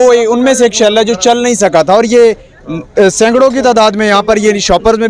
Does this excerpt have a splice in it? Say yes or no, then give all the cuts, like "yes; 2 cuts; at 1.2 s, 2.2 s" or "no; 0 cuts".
no; 0 cuts